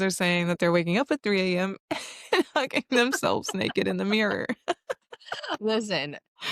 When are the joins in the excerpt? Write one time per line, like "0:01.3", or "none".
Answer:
none